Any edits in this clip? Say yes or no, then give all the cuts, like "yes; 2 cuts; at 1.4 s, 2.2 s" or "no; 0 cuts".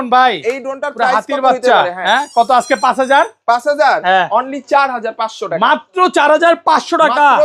no; 0 cuts